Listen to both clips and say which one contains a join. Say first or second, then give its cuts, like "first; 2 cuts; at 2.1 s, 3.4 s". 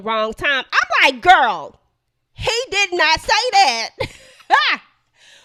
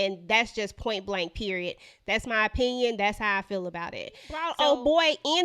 second; 1 cut; at 4.5 s